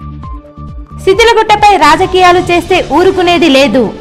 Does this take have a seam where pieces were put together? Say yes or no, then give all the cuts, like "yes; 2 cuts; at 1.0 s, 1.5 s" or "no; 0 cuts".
no; 0 cuts